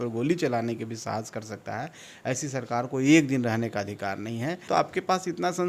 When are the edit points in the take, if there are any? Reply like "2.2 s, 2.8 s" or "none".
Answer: 4.7 s